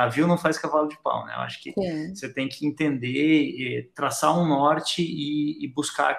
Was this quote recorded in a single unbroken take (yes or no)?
yes